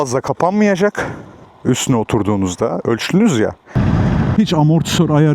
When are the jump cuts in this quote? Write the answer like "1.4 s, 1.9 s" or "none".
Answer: 3.7 s